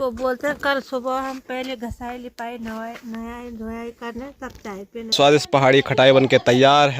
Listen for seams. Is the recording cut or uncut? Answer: cut